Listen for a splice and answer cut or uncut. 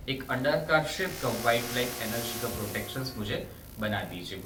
uncut